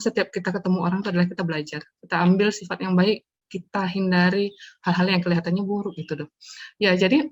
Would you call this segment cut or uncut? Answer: uncut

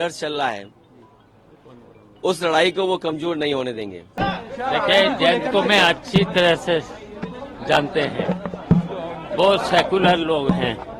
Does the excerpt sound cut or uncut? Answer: cut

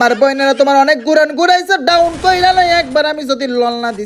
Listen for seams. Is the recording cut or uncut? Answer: uncut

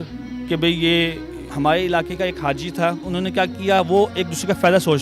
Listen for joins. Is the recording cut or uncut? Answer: cut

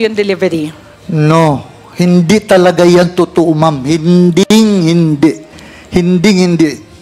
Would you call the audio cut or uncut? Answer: uncut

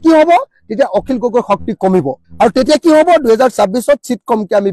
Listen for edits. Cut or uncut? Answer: uncut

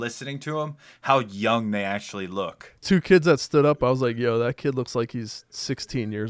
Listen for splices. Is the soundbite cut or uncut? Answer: cut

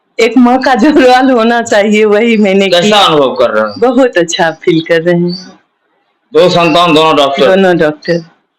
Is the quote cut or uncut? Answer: uncut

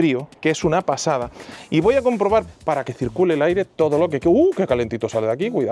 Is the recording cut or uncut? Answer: cut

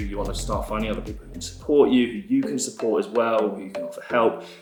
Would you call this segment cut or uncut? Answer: uncut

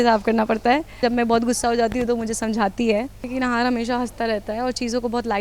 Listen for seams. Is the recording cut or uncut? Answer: cut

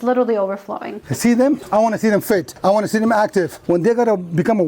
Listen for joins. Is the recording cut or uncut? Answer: cut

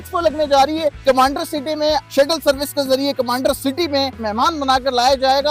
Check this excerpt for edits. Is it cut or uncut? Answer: cut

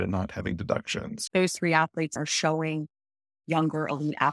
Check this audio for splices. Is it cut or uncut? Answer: cut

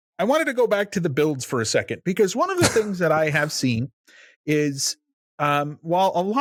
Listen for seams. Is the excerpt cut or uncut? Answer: uncut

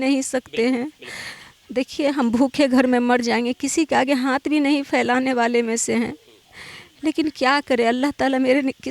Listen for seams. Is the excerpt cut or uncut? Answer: uncut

